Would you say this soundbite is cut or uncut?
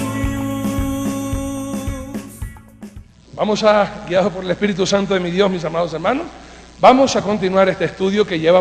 uncut